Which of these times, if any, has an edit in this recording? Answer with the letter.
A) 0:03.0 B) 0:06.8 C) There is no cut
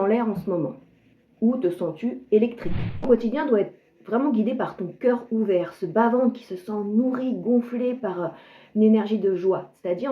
A